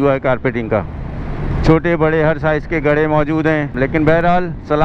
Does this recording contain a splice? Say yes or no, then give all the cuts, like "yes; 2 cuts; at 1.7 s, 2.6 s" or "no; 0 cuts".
yes; 1 cut; at 3.7 s